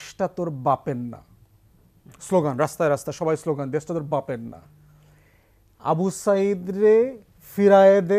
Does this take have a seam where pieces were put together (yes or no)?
no